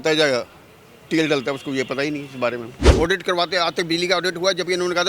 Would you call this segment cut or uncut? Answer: cut